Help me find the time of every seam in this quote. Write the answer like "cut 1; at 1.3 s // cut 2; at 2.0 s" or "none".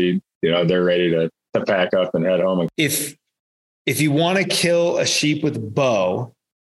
cut 1; at 2.7 s